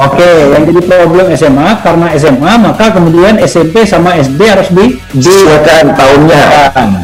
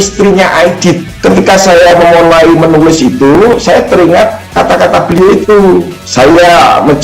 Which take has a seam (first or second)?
second